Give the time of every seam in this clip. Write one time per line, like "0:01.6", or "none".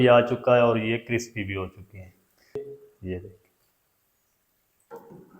0:02.7